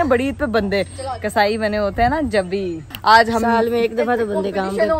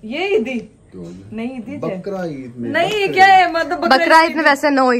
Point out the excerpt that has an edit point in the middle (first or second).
first